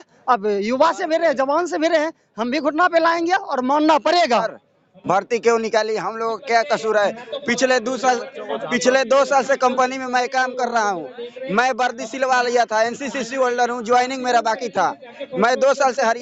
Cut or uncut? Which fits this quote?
uncut